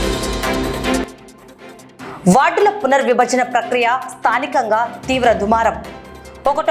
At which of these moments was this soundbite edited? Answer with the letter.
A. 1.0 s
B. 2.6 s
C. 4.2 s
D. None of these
A